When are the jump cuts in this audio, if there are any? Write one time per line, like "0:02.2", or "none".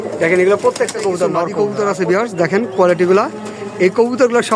0:01.4